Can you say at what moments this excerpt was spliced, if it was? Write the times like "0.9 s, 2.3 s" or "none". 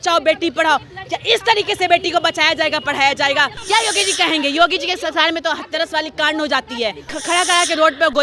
3.6 s, 7.1 s

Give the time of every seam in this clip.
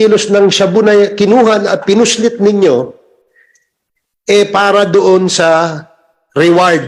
none

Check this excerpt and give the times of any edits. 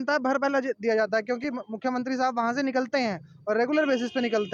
none

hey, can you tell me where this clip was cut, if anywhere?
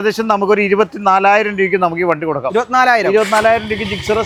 none

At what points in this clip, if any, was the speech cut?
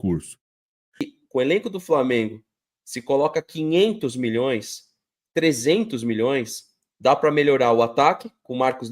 1.0 s

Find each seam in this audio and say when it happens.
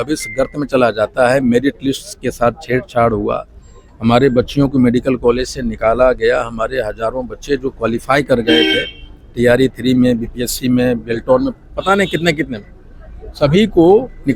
none

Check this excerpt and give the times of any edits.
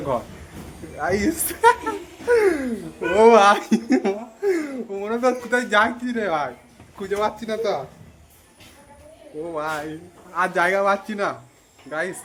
none

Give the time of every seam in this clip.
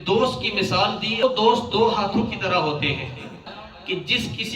1.2 s, 3.5 s

